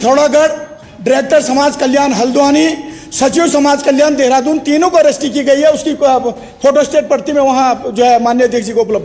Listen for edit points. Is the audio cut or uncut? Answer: uncut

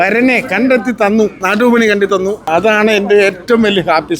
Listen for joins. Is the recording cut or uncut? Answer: cut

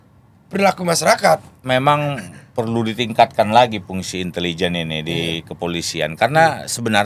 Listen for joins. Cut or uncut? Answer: cut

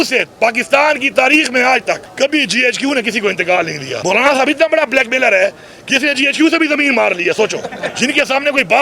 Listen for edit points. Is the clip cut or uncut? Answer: cut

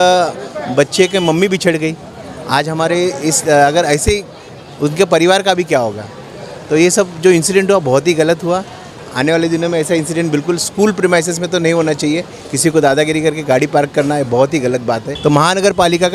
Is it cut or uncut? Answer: cut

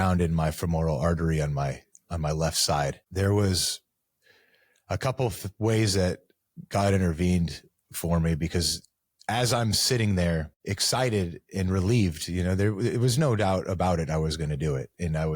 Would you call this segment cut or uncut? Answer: cut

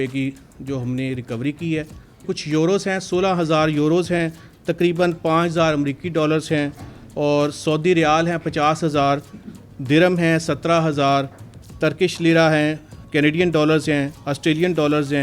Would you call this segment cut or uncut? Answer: cut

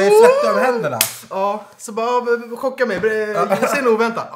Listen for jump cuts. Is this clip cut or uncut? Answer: uncut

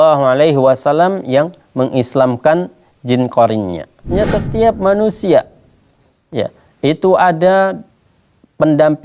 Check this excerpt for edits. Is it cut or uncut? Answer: cut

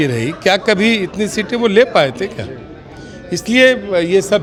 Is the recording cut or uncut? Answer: uncut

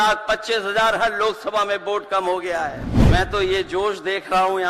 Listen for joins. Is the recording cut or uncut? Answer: cut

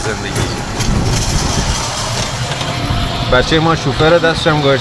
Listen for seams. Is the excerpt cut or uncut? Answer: uncut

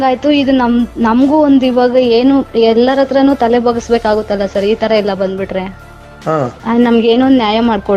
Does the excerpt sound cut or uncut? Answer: cut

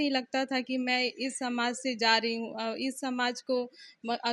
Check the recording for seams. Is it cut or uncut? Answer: uncut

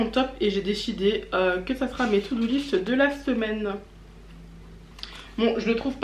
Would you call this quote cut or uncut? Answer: uncut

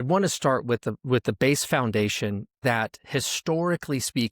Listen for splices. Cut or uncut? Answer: cut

